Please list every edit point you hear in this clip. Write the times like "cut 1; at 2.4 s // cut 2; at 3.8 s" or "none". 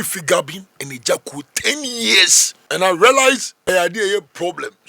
cut 1; at 2.8 s // cut 2; at 3.7 s